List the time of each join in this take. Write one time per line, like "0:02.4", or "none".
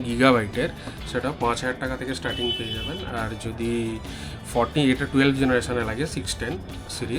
none